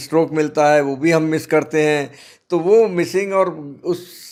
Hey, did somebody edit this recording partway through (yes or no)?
no